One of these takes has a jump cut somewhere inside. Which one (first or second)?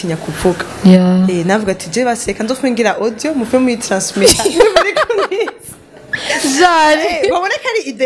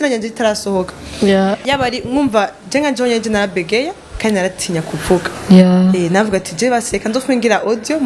second